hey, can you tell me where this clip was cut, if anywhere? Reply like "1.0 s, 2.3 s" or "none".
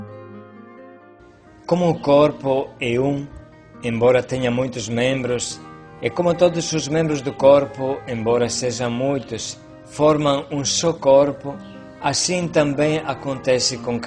1.1 s